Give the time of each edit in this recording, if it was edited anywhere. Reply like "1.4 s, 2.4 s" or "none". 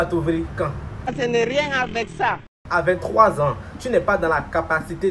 none